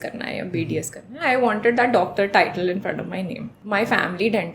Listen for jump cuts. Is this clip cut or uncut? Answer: cut